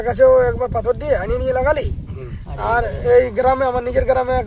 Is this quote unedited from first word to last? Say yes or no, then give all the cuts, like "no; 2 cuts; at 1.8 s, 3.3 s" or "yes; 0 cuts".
yes; 0 cuts